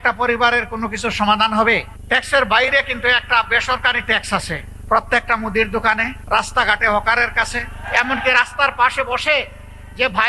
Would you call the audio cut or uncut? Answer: cut